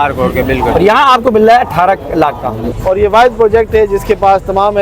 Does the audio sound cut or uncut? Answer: cut